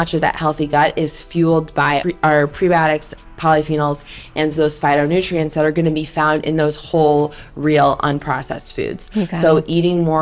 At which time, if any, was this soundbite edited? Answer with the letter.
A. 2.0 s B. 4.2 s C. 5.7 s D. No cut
A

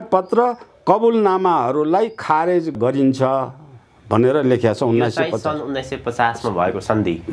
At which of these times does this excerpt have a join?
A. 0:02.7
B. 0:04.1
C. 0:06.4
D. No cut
A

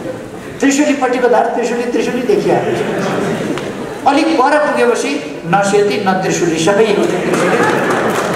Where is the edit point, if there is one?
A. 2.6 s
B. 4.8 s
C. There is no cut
C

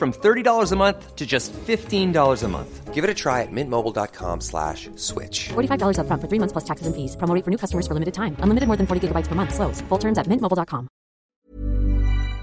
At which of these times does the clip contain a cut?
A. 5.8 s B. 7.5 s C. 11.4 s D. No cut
C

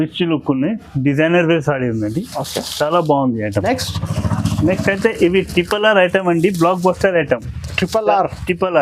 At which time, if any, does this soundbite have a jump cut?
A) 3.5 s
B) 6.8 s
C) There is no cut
A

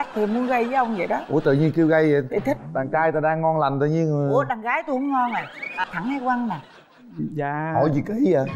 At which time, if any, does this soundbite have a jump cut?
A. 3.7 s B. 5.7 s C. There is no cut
B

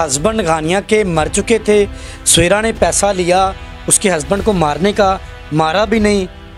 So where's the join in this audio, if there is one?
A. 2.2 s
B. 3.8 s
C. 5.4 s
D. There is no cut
D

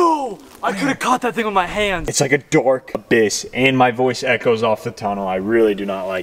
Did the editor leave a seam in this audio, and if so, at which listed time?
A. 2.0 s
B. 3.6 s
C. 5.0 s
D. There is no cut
A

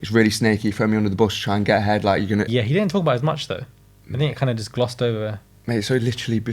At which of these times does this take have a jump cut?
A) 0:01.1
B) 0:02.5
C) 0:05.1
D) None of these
B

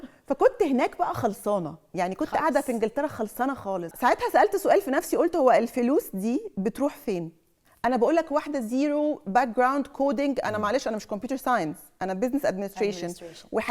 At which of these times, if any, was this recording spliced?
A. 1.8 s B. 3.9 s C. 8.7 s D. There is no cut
B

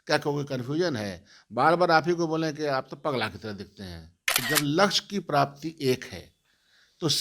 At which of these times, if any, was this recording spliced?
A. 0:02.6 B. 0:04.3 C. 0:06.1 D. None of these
B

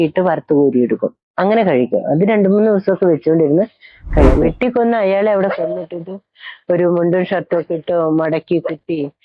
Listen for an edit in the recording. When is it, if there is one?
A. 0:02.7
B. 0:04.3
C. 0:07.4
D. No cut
B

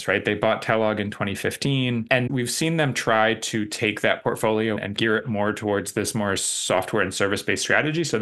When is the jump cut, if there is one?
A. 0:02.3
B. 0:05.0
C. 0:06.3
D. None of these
A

